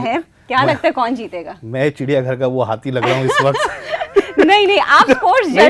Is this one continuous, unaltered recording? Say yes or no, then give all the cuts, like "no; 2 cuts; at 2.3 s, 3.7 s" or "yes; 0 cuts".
yes; 0 cuts